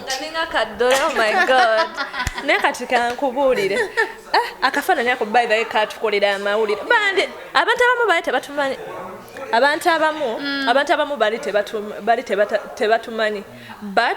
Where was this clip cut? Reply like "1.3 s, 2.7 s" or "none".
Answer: none